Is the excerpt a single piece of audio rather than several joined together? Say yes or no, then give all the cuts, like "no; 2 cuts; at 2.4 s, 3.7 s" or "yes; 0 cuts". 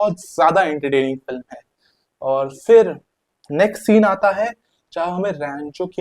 yes; 0 cuts